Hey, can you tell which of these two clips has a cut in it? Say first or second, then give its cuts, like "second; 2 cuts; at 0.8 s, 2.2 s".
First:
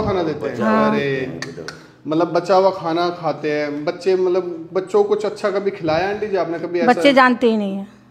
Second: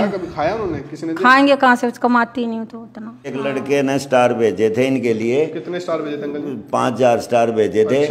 second; 1 cut; at 3.3 s